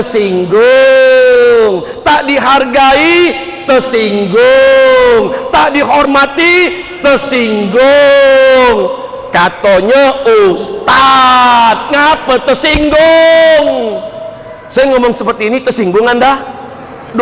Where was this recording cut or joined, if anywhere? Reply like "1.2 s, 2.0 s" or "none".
none